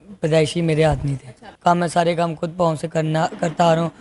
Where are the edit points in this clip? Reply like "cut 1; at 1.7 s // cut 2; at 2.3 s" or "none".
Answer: cut 1; at 1.5 s